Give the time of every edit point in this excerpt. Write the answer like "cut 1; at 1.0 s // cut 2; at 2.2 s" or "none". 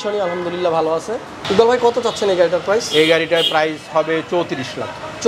cut 1; at 1.3 s